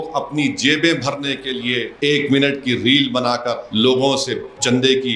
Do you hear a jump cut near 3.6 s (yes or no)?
yes